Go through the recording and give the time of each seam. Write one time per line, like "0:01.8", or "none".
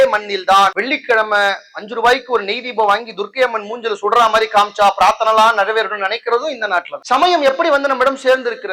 none